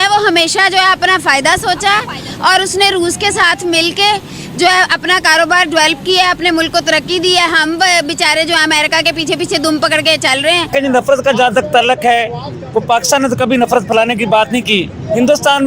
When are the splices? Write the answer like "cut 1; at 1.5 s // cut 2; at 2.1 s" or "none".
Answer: cut 1; at 10.7 s